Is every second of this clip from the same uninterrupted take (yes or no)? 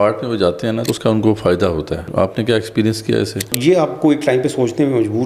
no